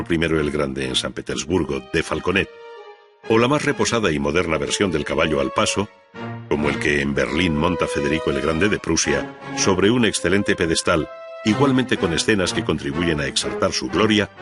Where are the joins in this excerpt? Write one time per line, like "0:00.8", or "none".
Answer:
0:03.6

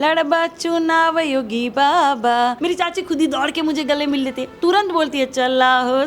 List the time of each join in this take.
0:02.6

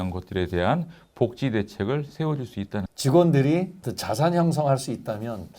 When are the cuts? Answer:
0:02.8

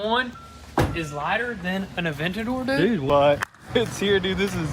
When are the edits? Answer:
0:03.0

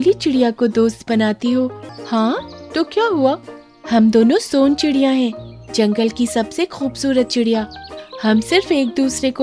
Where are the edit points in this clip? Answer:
0:01.8

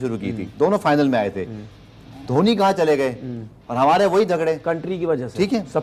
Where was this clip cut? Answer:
none

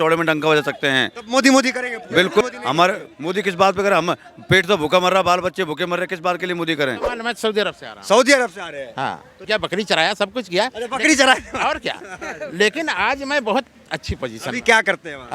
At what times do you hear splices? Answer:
0:02.4
0:07.1
0:09.3

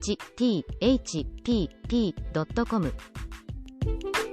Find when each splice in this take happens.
0:02.9

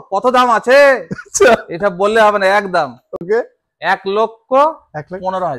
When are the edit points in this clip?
none

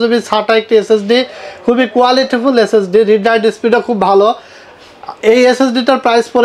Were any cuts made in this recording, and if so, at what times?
none

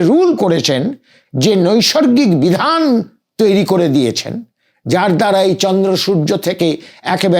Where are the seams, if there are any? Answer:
none

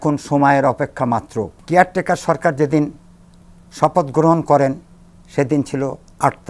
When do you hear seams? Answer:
0:01.5

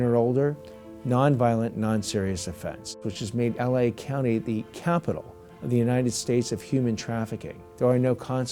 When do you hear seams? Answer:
0:03.1
0:07.6

